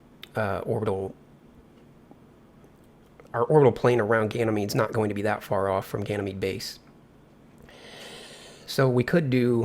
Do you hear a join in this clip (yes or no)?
yes